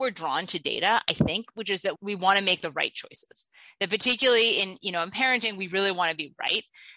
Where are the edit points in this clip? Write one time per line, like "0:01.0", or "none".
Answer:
0:02.0